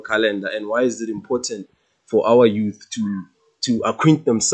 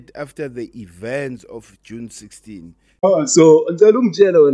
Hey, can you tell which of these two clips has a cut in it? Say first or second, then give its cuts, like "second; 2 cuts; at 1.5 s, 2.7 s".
second; 1 cut; at 3.0 s